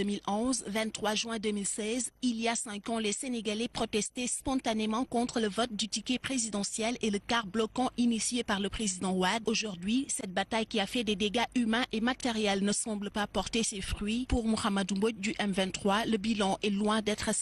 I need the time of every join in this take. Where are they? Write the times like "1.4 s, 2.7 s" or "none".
2.9 s

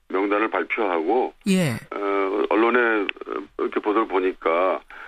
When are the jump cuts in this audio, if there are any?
none

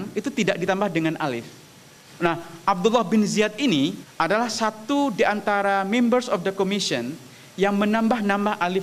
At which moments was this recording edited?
2.3 s, 4.0 s

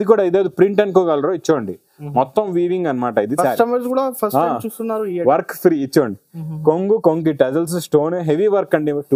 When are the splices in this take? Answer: 3.3 s

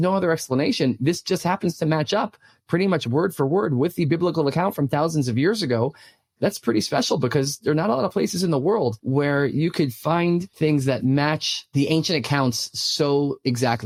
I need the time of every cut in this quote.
none

